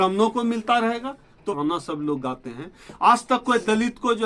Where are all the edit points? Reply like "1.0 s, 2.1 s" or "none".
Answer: 1.6 s